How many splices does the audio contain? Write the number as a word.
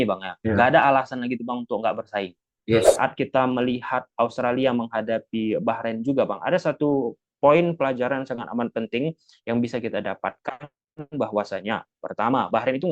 one